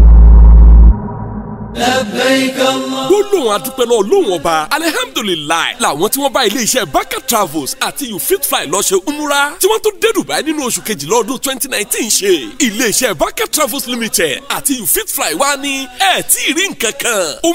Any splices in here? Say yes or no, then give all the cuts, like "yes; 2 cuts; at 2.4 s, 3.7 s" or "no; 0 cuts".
yes; 1 cut; at 1.7 s